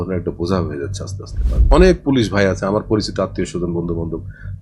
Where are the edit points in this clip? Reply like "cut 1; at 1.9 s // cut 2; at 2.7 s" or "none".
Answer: cut 1; at 1.5 s

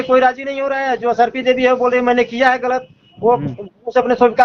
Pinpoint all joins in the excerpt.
none

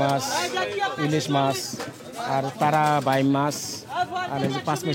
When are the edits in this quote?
none

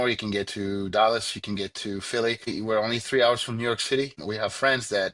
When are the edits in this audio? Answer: cut 1; at 2.5 s // cut 2; at 4.2 s

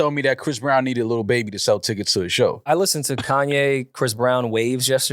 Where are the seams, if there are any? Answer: cut 1; at 2.6 s

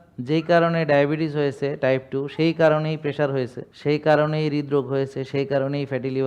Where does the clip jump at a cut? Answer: cut 1; at 3.6 s

